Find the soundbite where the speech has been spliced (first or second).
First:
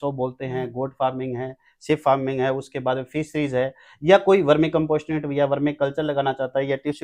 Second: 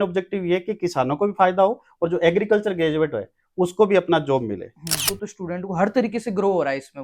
second